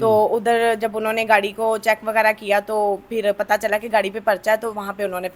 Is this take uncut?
yes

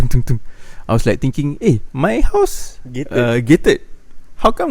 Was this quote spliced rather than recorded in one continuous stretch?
yes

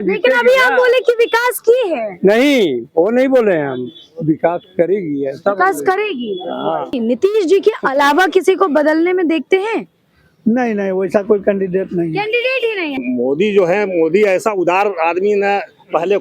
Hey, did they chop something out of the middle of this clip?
yes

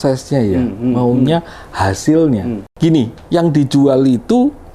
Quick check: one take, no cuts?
no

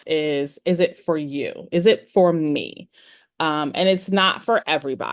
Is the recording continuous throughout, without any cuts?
yes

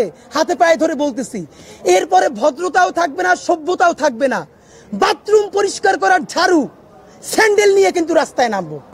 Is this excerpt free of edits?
yes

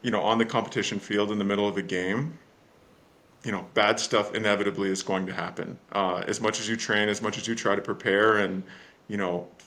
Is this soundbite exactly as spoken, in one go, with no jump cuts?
yes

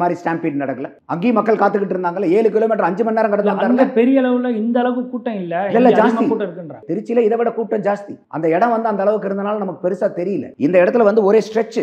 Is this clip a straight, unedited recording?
yes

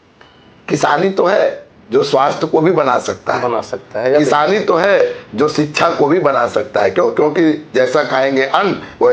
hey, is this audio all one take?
yes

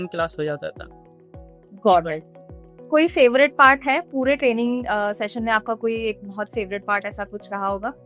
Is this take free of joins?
yes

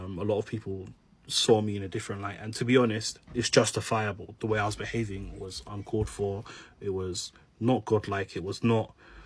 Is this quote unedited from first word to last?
no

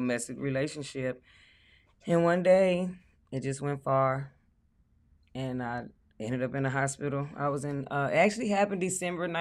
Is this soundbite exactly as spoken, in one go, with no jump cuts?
yes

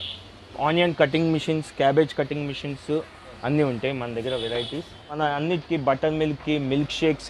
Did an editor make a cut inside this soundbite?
yes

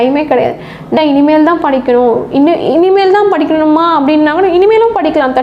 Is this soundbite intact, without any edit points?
no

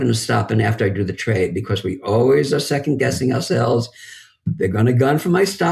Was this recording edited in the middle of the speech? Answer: no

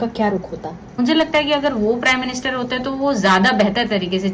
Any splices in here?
yes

